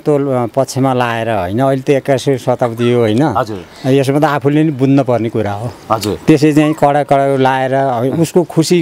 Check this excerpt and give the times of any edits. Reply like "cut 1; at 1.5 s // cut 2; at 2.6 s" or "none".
none